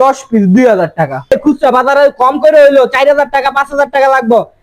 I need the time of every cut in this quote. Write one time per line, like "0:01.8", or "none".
0:01.3